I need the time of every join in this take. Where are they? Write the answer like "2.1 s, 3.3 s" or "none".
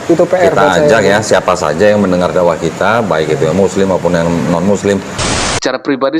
5.2 s